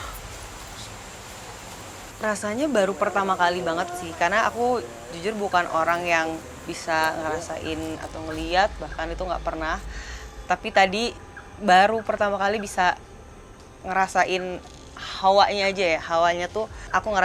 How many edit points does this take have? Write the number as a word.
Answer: zero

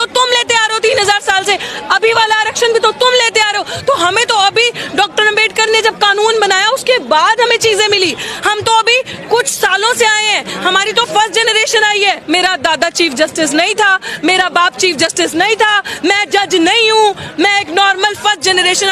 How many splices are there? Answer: one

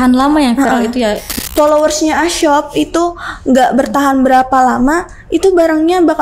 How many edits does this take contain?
one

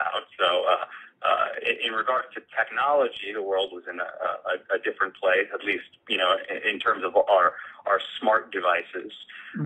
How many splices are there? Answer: one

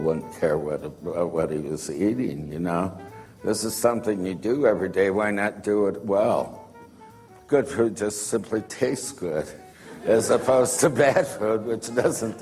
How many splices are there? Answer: one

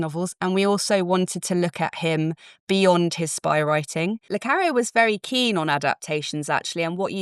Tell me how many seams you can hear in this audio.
one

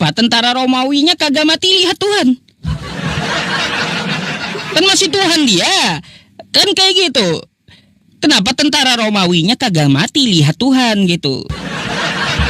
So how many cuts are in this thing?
one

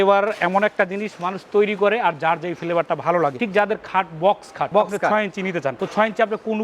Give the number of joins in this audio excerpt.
zero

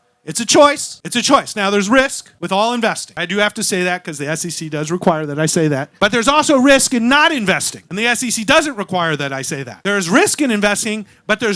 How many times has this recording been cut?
zero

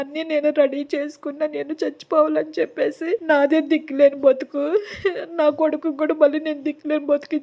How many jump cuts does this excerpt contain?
one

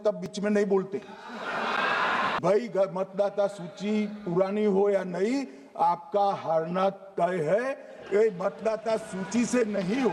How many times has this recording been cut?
one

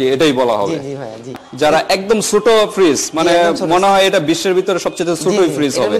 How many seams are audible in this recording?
one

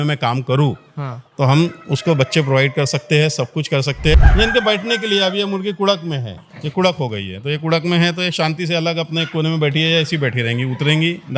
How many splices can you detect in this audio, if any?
one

